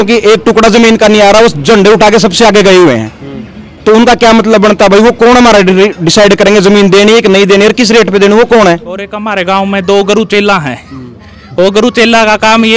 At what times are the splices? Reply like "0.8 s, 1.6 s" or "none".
9.2 s